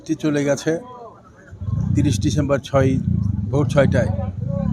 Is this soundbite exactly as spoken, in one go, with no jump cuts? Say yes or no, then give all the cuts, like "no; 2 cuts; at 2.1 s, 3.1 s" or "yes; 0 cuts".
yes; 0 cuts